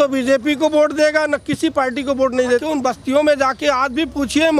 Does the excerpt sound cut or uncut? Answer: cut